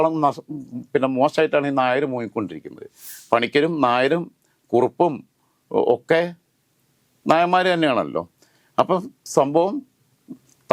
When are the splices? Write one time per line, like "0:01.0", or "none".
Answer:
0:03.1